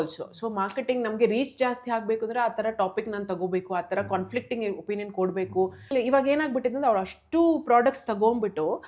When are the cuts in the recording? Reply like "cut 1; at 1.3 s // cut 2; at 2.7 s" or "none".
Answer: cut 1; at 5.9 s